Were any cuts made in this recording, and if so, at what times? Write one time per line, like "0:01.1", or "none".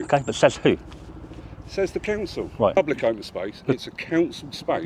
0:02.8